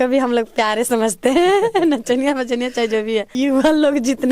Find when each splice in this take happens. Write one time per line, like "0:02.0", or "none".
0:03.4